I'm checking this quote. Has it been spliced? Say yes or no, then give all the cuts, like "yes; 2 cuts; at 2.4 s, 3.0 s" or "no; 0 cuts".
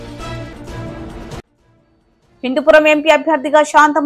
yes; 1 cut; at 1.4 s